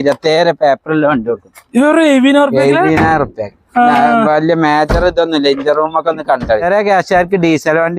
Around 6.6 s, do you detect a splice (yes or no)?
yes